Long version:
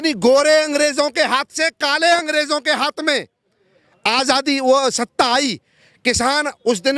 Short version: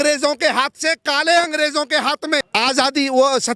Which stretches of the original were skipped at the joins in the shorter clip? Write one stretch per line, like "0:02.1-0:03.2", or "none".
0:03.2-0:04.0